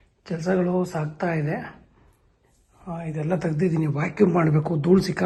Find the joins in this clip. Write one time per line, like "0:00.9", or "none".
none